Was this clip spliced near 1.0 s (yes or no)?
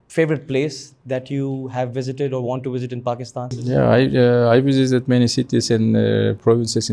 no